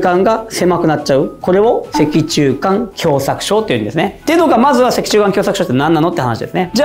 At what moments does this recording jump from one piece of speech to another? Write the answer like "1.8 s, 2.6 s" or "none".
none